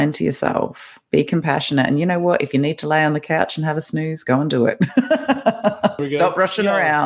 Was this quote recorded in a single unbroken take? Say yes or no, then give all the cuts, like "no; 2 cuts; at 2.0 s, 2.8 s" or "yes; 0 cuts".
no; 1 cut; at 6.0 s